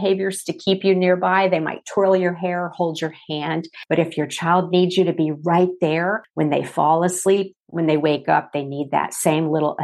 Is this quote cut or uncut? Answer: cut